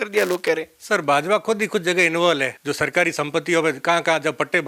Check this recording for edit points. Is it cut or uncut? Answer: cut